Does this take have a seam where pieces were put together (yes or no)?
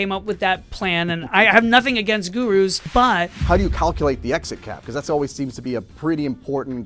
yes